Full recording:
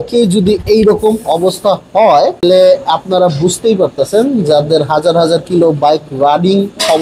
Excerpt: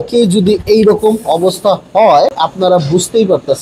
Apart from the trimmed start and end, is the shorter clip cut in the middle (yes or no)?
yes